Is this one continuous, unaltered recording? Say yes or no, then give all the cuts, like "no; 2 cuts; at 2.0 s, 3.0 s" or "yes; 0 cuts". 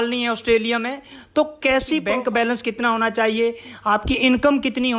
no; 1 cut; at 2.0 s